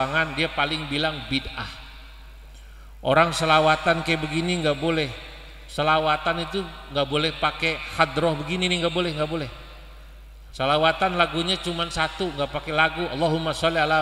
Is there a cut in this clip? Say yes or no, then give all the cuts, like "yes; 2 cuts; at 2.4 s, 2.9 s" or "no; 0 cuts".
no; 0 cuts